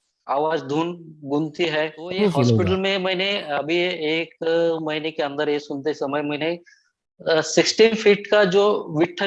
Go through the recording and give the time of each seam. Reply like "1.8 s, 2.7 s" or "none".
2.1 s